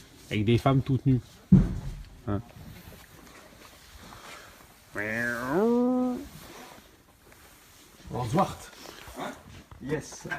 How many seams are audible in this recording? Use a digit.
1